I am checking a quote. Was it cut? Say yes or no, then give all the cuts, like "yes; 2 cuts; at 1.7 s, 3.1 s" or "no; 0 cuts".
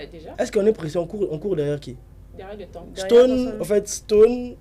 no; 0 cuts